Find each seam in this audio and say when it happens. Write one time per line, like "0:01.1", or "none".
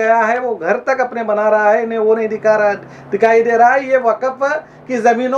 none